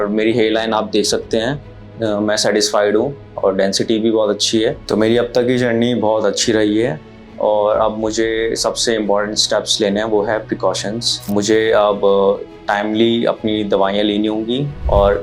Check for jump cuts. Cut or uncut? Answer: cut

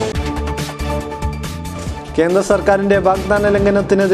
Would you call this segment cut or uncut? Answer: uncut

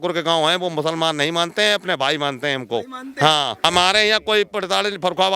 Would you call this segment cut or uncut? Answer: cut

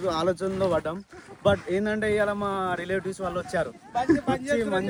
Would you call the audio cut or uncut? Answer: uncut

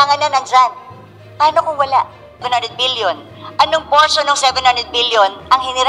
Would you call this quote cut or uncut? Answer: cut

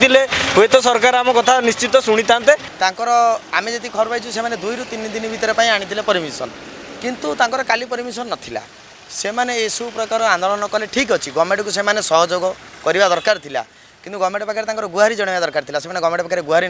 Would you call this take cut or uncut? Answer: cut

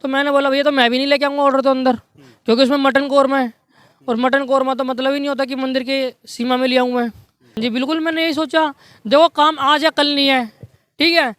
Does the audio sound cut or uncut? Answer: cut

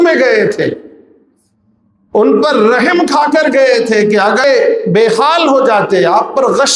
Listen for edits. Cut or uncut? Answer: cut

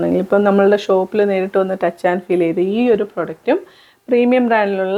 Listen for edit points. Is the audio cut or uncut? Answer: uncut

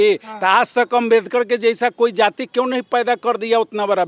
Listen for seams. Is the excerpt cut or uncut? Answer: uncut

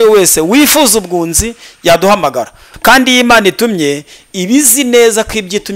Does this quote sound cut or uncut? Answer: cut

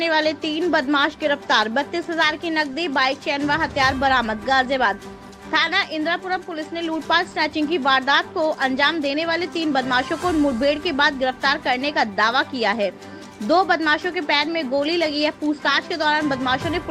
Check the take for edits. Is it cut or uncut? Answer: uncut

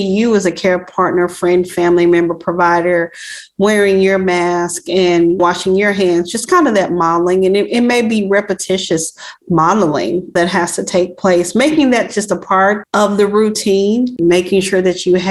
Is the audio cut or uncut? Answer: cut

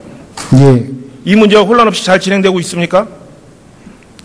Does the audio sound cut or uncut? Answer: cut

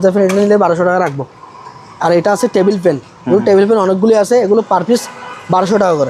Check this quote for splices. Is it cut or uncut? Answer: uncut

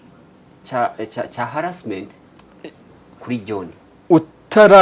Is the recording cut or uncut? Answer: uncut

